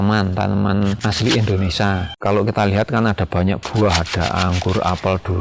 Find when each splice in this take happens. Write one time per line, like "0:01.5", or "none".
0:01.0